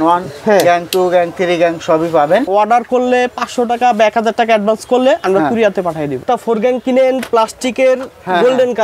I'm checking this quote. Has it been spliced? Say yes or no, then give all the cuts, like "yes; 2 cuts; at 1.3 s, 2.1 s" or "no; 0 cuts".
yes; 2 cuts; at 2.5 s, 6.2 s